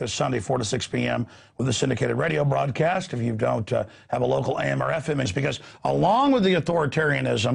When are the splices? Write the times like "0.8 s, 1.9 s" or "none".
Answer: none